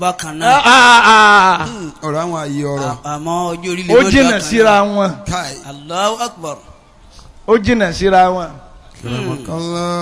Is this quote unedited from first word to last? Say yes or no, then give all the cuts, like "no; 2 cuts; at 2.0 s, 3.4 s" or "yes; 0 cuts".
yes; 0 cuts